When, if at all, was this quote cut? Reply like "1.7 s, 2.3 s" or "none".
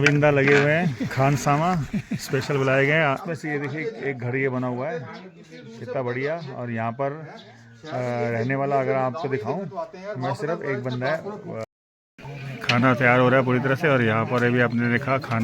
3.2 s, 11.6 s